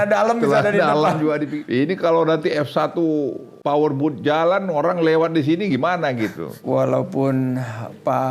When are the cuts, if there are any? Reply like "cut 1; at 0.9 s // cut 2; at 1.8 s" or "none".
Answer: cut 1; at 1.5 s // cut 2; at 3.5 s // cut 3; at 6.6 s